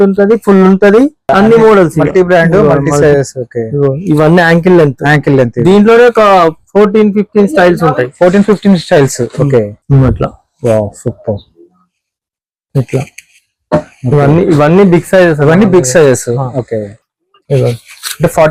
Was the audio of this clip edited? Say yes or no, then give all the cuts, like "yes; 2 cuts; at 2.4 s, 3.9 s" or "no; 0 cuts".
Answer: no; 0 cuts